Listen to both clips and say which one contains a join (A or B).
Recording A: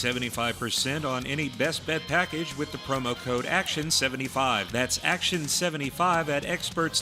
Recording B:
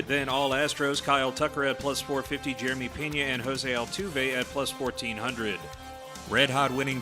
B